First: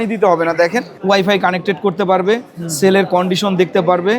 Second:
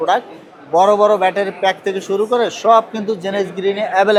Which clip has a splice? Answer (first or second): first